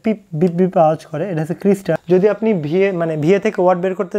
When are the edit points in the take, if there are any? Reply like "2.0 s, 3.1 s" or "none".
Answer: 2.0 s